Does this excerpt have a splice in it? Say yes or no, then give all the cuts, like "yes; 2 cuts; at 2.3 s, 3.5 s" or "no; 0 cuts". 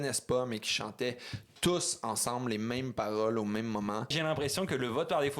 yes; 1 cut; at 4.2 s